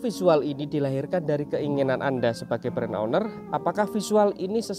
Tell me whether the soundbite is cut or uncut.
uncut